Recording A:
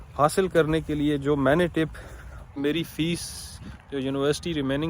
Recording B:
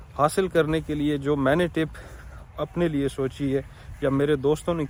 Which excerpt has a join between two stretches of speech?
A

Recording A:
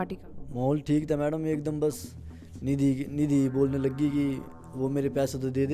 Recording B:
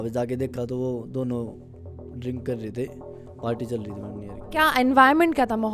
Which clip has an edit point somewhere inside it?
B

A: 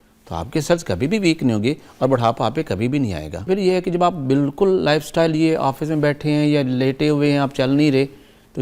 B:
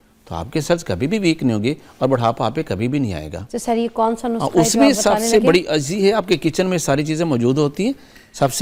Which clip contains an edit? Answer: A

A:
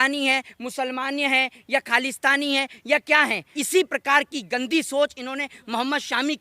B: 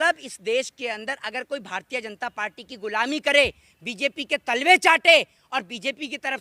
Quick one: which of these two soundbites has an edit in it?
A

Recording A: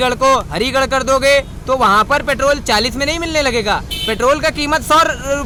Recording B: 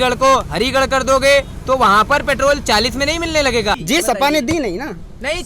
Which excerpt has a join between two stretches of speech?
B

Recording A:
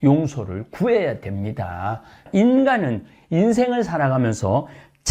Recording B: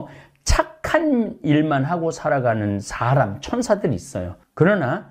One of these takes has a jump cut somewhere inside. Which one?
A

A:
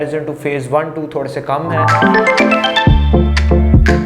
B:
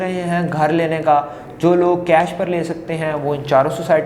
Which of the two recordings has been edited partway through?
A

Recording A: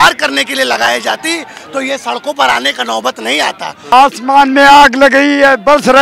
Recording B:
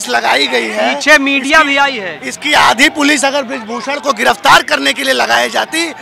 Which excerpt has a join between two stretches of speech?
A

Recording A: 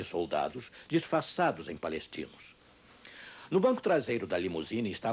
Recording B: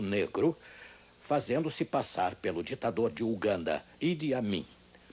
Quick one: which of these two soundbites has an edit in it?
A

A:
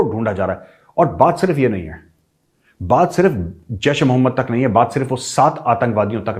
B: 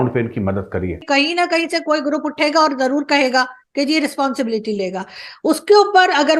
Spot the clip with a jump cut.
B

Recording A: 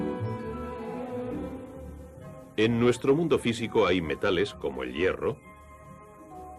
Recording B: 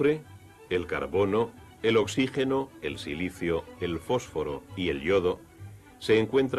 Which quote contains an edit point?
A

